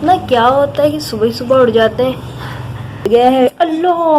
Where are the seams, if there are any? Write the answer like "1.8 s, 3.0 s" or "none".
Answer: 3.0 s